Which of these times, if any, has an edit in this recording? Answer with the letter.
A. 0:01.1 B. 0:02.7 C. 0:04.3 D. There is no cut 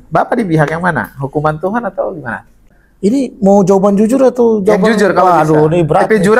B